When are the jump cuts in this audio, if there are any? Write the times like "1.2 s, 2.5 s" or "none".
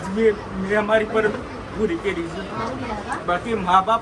none